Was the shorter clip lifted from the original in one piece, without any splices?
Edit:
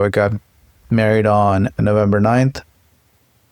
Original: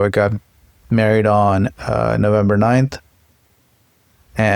no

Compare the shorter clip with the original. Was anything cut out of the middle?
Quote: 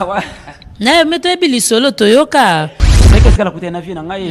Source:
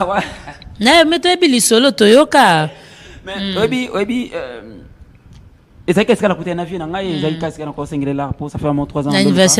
yes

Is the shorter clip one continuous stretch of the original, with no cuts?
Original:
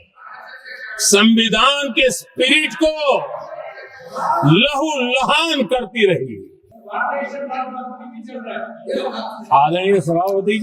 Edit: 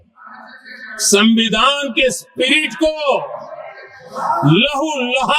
yes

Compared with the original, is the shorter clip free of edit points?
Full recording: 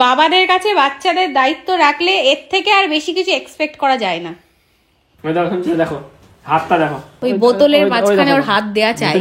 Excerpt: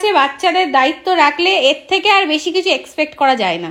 yes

